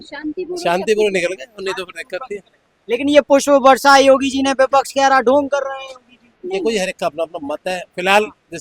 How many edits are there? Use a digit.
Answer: 0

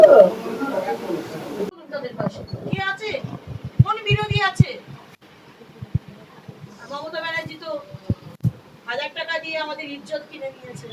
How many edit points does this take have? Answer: 1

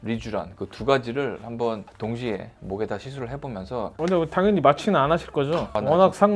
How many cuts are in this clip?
1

